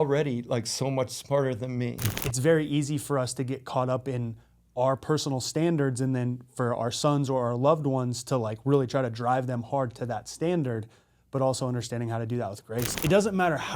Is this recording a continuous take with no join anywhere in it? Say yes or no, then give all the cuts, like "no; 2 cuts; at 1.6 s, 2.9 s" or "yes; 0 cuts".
no; 2 cuts; at 2.1 s, 12.9 s